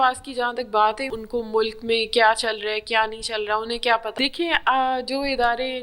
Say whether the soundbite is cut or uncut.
cut